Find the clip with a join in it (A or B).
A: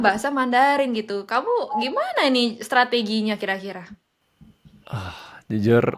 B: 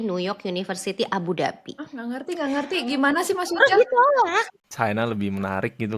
B